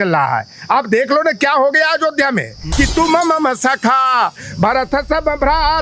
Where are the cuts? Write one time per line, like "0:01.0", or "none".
0:02.6